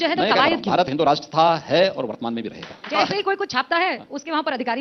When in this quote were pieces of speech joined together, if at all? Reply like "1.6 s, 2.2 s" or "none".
2.9 s